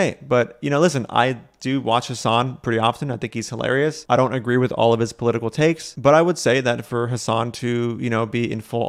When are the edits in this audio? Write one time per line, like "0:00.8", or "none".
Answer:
none

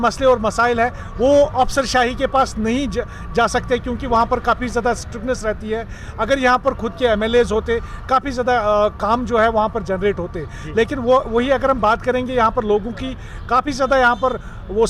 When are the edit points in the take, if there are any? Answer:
none

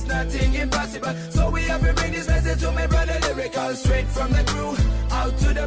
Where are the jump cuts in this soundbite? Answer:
0:01.6

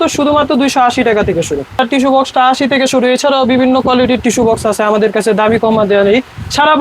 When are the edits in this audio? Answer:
0:01.8

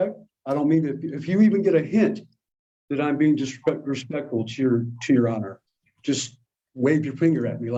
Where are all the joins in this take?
none

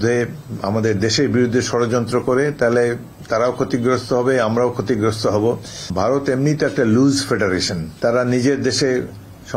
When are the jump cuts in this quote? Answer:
0:05.8
0:07.8

